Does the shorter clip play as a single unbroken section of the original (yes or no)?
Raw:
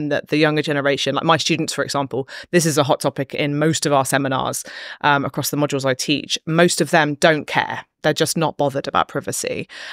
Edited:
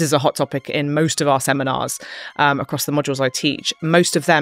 yes